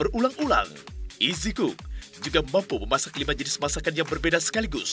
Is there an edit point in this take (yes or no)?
yes